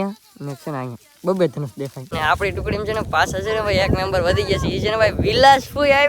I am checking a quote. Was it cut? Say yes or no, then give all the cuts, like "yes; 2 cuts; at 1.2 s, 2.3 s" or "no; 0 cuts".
yes; 1 cut; at 2.1 s